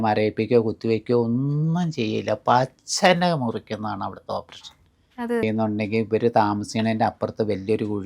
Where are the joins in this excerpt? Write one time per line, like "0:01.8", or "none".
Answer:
0:05.4